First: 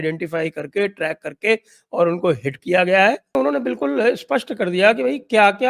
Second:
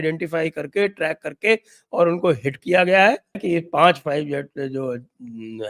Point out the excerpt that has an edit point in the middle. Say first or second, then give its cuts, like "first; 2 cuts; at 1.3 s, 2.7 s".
first; 1 cut; at 3.2 s